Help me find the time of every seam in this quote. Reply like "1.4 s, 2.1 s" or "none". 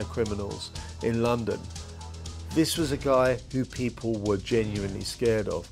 2.1 s